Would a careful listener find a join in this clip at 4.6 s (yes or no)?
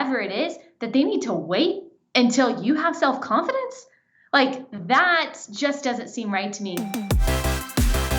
no